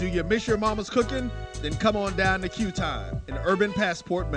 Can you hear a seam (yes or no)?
no